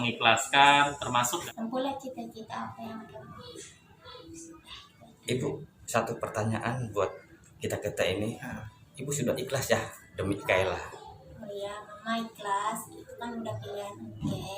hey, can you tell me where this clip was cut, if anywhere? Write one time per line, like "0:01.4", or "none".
0:01.4